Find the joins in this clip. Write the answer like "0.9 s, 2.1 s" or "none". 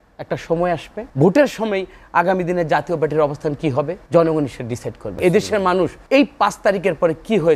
1.0 s, 4.0 s, 5.1 s, 6.0 s